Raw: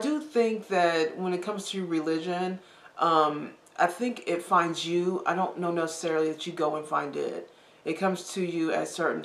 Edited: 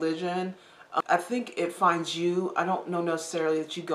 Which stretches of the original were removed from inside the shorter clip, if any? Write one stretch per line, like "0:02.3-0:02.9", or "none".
0:03.0-0:03.7